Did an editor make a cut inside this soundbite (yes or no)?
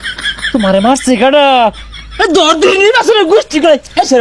no